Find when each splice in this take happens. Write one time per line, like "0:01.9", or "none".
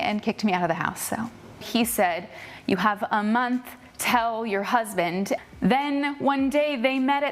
0:01.2

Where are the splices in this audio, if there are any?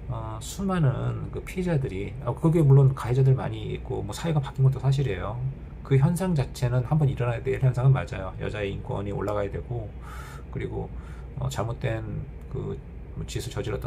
none

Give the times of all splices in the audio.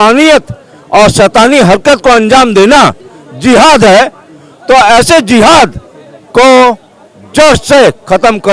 none

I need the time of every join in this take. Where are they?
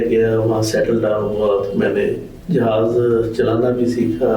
0:02.3

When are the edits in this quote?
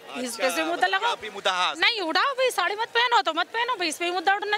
none

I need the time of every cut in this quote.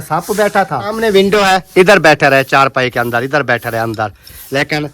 0:00.9

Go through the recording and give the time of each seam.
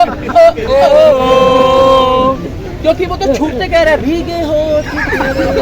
none

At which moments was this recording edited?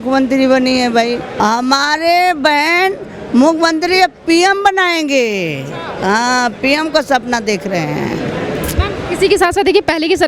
0:01.3

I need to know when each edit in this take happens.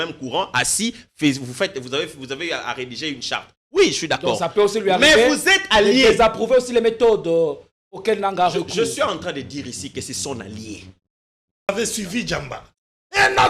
0:11.7

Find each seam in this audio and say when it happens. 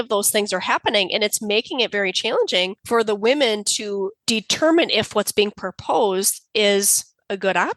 0:02.8
0:04.2

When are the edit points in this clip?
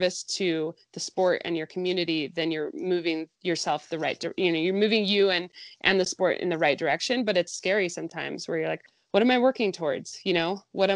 0:03.3
0:08.9

